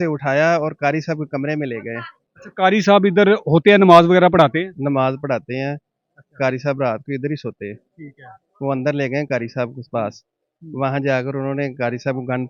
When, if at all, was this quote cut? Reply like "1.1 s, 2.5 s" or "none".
none